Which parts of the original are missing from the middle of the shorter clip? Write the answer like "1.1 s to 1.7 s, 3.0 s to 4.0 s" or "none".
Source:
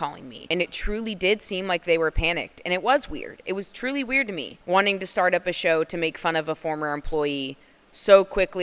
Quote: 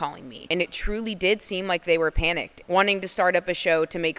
2.5 s to 4.5 s